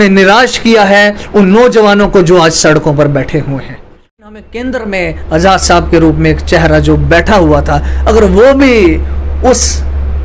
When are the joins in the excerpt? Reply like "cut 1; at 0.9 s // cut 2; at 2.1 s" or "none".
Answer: cut 1; at 4.2 s